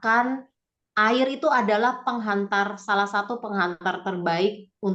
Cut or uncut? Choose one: uncut